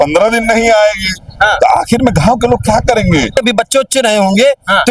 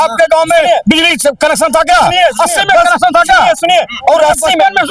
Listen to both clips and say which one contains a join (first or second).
first